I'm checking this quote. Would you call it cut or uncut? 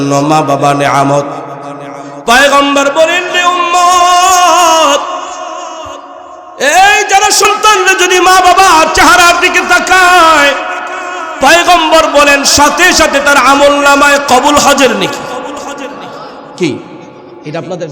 cut